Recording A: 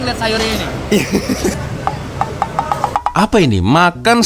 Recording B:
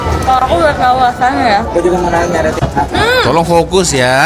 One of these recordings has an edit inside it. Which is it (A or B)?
A